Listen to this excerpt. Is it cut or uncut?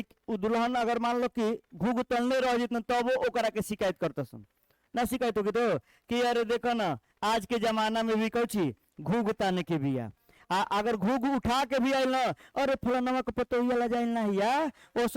uncut